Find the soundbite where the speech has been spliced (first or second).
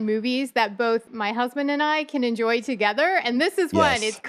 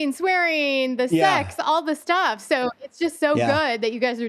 first